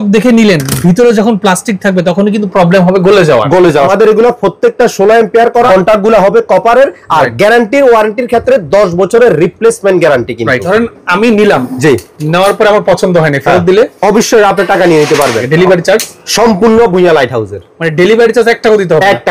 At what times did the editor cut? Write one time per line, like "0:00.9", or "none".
0:03.9
0:05.7
0:10.6
0:15.4